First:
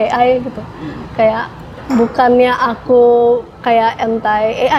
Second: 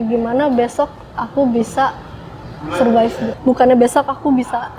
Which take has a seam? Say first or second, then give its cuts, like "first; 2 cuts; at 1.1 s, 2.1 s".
second; 1 cut; at 3.3 s